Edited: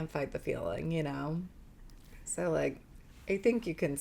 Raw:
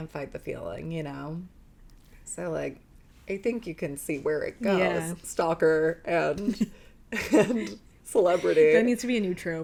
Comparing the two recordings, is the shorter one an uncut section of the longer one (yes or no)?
yes